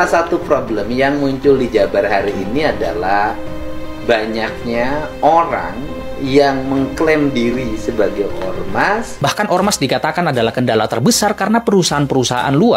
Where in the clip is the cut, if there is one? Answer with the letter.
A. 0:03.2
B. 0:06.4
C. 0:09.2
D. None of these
C